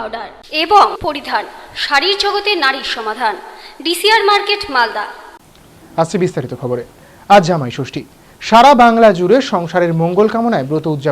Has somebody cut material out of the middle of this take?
no; 0 cuts

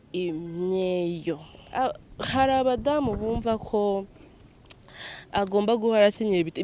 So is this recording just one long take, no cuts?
no; 1 cut; at 1.5 s

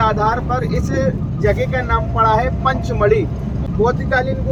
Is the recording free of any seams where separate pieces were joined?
yes; 0 cuts

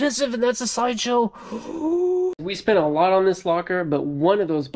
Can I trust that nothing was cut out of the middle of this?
no; 1 cut; at 2.5 s

